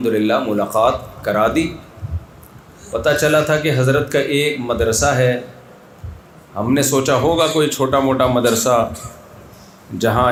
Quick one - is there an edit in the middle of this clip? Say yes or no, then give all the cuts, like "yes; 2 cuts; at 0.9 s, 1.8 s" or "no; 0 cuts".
no; 0 cuts